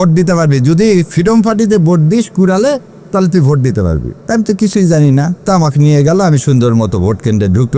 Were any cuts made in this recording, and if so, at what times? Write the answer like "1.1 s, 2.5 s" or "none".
4.1 s